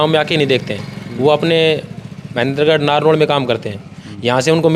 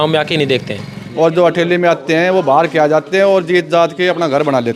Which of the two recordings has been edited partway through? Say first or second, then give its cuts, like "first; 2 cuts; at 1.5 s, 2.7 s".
second; 1 cut; at 1.0 s